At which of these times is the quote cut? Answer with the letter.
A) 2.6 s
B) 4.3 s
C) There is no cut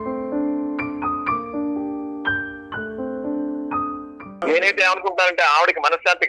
B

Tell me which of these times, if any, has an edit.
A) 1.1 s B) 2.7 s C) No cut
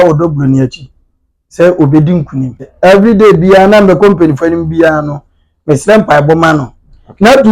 B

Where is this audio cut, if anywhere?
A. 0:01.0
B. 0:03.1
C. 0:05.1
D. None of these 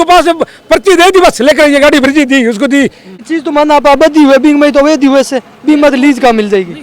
B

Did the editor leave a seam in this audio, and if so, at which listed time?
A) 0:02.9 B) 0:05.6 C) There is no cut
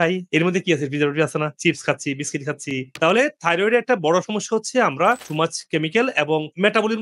A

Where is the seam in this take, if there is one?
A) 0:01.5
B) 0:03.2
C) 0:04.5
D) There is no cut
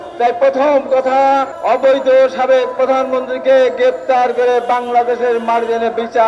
A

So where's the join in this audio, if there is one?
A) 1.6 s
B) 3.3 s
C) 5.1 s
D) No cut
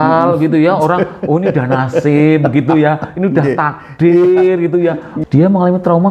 C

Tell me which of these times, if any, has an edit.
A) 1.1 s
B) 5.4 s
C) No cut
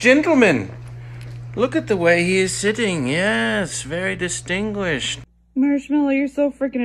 B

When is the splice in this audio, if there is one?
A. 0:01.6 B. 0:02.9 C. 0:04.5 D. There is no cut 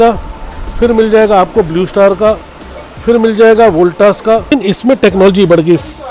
C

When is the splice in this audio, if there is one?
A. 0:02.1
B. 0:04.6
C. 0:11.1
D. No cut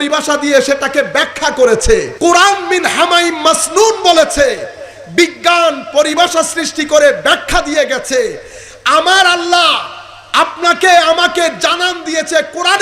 A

